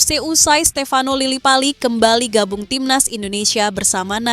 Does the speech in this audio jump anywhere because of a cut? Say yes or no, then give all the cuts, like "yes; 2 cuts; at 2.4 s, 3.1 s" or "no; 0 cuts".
no; 0 cuts